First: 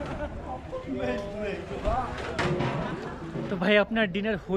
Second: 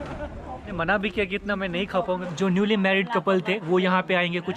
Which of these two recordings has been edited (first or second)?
second